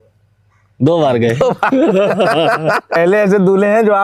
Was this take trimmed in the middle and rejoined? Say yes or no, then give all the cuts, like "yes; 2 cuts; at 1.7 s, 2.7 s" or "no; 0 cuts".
yes; 1 cut; at 3.0 s